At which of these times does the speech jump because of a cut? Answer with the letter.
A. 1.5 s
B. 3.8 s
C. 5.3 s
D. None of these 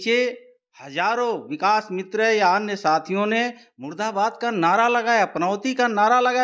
D